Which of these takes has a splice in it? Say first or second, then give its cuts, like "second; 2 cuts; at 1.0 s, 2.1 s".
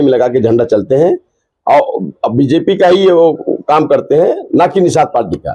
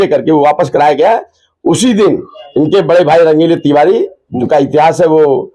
second; 2 cuts; at 2.4 s, 4.2 s